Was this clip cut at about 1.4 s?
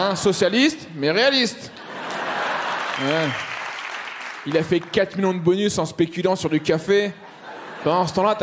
no; 1 cut; at 2.9 s

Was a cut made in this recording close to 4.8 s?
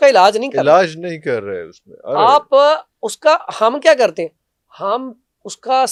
no; 0 cuts

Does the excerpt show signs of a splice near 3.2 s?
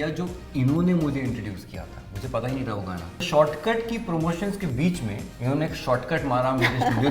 yes; 2 cuts; at 3.2 s, 5.3 s

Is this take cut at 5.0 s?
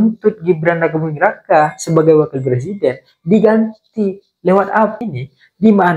yes; 1 cut; at 5.0 s

